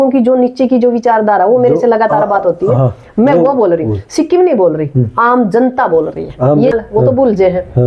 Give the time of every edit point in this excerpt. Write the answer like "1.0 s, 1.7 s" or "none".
6.8 s